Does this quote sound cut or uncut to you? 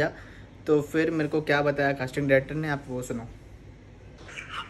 uncut